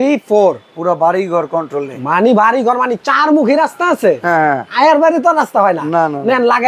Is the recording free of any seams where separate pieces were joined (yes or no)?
yes